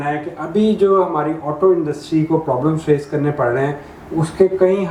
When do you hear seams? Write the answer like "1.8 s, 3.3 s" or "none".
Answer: none